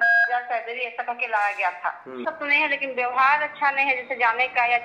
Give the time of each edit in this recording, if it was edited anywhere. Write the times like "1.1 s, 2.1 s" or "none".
2.2 s